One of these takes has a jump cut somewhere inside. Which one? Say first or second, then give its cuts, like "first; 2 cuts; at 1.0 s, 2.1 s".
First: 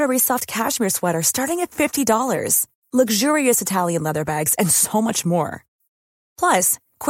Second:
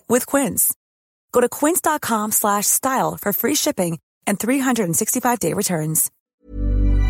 second; 1 cut; at 6.1 s